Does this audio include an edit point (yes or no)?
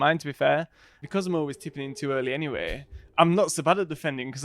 yes